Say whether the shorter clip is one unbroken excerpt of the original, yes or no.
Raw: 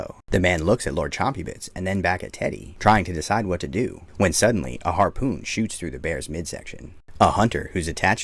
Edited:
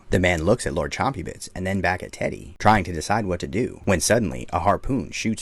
no